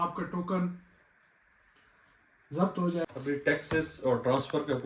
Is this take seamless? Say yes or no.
no